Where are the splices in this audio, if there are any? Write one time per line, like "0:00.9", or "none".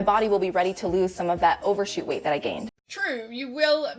0:02.6